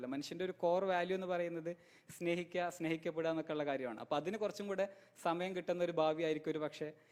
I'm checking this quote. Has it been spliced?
no; 0 cuts

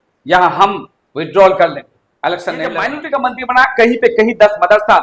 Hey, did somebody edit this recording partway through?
yes; 1 cut; at 2.9 s

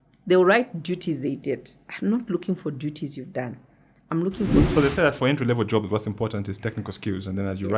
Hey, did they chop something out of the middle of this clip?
yes; 1 cut; at 4.7 s

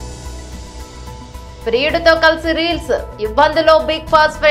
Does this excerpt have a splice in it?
yes; 1 cut; at 1.2 s

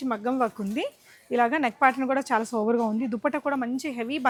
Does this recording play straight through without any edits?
yes; 0 cuts

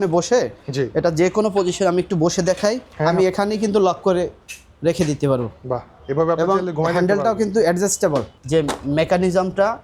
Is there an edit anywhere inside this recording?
yes; 2 cuts; at 3.0 s, 8.4 s

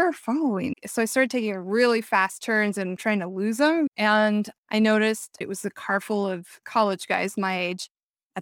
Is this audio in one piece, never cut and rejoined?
no; 4 cuts; at 3.0 s, 3.9 s, 5.3 s, 6.6 s

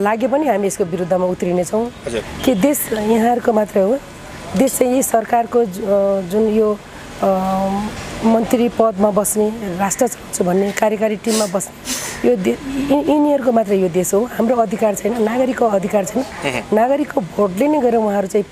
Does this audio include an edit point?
yes; 1 cut; at 2.2 s

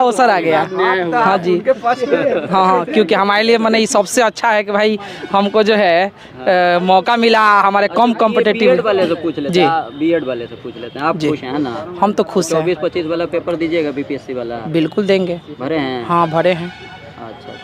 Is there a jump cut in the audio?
no; 0 cuts

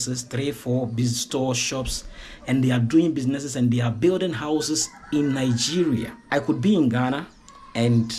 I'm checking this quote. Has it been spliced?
yes; 1 cut; at 6.2 s

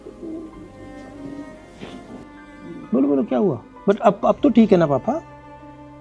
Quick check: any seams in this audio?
no; 0 cuts

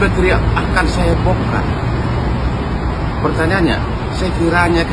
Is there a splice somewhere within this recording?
no; 0 cuts

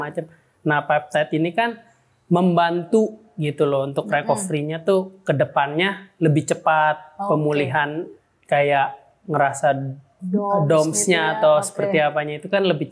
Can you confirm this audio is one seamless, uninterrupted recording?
yes; 0 cuts

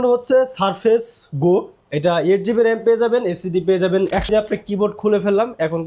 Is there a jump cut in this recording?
yes; 1 cut; at 4.3 s

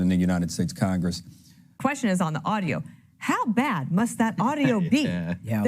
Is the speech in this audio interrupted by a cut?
yes; 1 cut; at 1.8 s

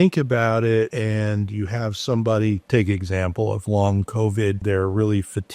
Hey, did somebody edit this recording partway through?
yes; 2 cuts; at 0.9 s, 4.6 s

